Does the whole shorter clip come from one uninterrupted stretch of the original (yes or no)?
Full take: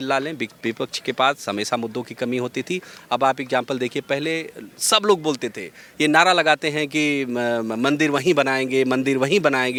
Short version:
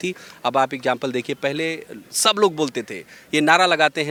yes